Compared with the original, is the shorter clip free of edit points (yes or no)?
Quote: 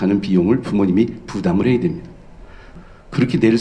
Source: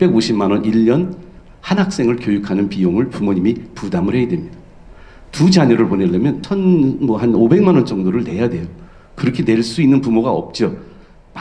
no